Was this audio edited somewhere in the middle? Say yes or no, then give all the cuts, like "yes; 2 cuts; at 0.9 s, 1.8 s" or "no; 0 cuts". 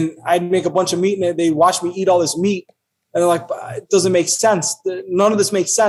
no; 0 cuts